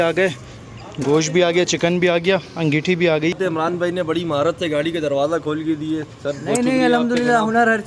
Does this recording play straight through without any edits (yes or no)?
no